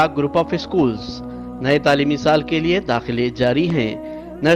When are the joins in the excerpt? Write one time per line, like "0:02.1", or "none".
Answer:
none